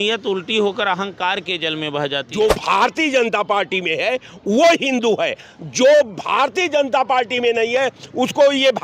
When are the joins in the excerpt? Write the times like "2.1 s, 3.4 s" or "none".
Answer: 2.3 s